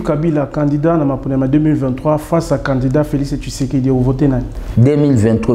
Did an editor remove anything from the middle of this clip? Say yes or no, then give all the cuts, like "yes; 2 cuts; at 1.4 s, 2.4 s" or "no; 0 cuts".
no; 0 cuts